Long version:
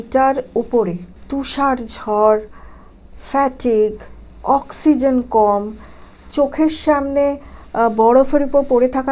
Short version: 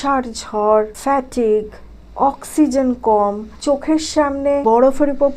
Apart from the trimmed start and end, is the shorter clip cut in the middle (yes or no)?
yes